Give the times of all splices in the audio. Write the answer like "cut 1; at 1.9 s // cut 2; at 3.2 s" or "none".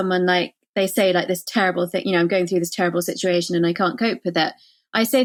none